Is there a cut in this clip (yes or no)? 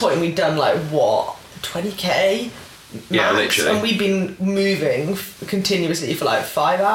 no